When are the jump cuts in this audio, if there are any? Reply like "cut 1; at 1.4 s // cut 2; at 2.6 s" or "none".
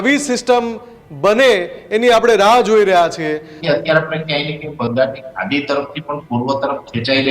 cut 1; at 3.5 s